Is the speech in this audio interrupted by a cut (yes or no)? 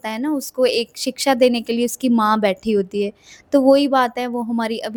no